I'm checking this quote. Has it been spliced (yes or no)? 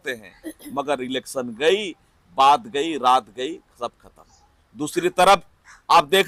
no